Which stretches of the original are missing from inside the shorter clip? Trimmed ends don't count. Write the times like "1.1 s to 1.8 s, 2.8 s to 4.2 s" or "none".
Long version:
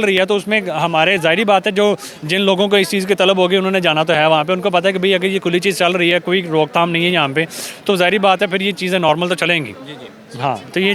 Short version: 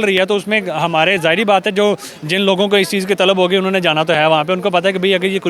none